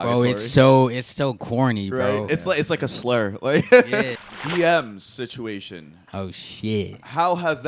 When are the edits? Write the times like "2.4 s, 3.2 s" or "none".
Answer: 4.1 s